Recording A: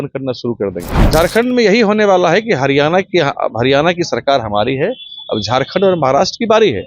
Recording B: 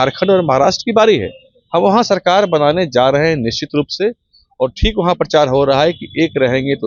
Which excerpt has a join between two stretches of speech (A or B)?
A